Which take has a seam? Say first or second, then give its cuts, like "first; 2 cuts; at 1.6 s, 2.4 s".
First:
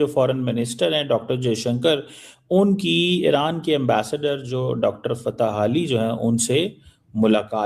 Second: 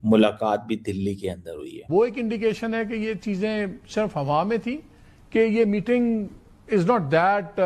second; 1 cut; at 1.8 s